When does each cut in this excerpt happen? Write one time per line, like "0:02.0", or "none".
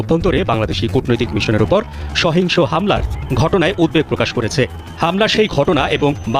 none